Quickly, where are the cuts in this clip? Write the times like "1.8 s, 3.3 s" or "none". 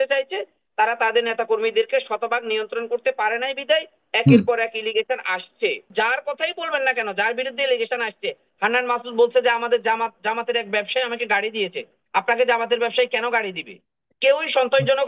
5.9 s